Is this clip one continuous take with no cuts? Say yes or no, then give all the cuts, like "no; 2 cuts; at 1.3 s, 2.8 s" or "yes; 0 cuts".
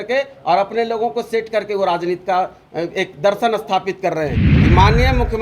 no; 1 cut; at 4.5 s